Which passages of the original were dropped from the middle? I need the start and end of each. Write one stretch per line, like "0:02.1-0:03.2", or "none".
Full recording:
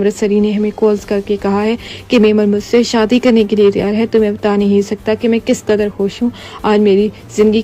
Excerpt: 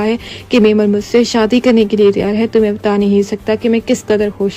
none